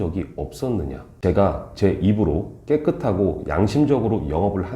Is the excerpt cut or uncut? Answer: cut